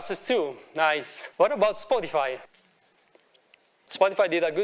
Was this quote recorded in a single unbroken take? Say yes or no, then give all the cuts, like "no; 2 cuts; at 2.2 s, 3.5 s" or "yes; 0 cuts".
no; 2 cuts; at 1.2 s, 2.5 s